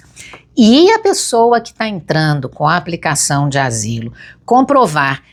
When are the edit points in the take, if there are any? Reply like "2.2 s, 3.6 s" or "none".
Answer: none

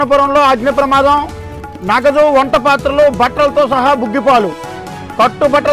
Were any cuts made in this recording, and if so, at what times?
none

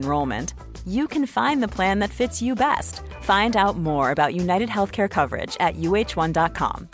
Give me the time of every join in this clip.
none

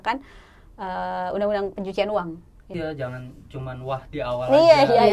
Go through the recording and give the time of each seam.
2.6 s

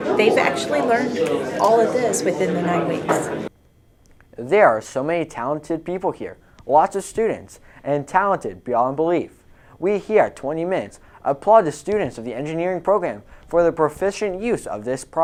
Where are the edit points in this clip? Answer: none

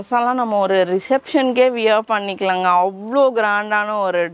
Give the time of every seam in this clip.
none

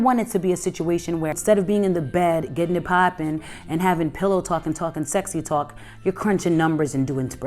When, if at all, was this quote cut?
1.4 s

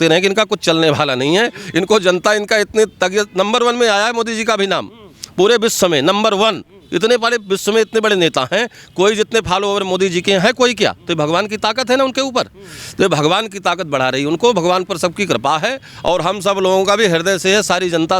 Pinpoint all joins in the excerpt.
none

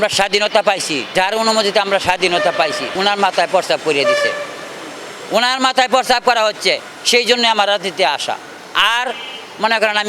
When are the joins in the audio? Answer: 1.0 s, 2.9 s

